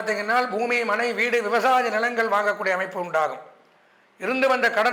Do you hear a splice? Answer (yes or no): no